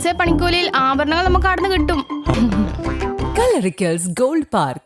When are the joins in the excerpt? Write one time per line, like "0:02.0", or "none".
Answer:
0:02.3

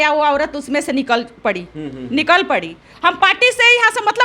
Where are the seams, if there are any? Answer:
none

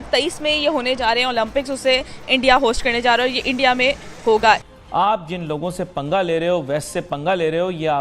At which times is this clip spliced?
0:04.7

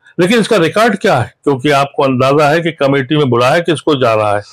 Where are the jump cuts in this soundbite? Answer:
0:01.3

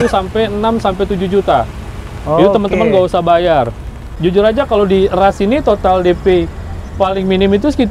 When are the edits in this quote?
0:04.1

